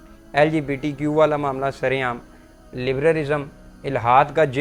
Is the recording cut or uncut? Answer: uncut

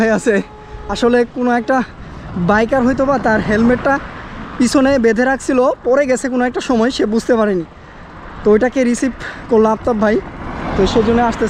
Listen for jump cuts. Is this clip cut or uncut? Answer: uncut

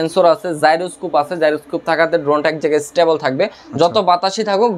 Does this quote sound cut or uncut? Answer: uncut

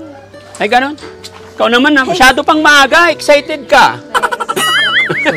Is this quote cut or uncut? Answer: cut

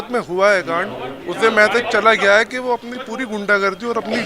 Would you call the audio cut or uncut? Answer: uncut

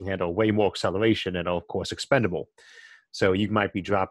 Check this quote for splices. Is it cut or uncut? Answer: uncut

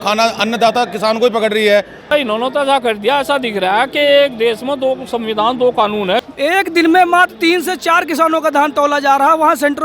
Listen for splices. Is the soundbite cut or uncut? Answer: cut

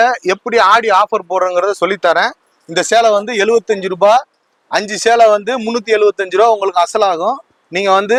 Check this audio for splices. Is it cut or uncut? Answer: uncut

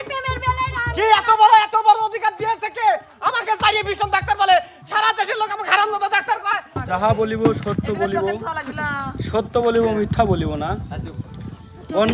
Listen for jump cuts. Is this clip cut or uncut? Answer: cut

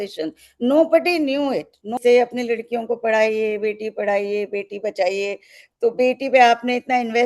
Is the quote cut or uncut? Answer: cut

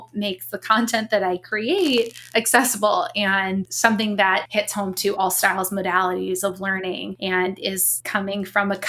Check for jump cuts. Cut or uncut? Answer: cut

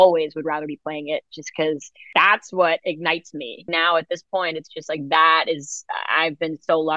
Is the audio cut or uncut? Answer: cut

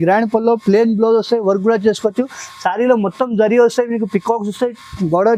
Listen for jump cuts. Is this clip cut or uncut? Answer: uncut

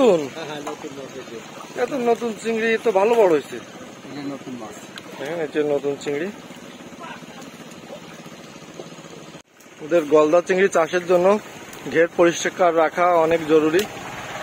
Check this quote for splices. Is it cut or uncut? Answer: uncut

